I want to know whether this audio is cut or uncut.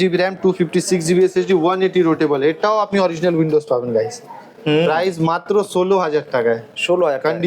uncut